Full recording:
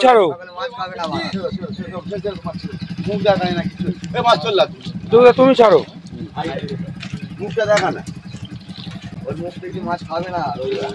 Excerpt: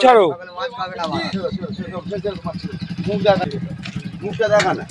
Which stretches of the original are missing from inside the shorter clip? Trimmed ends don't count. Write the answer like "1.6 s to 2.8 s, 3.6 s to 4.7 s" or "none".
3.5 s to 6.6 s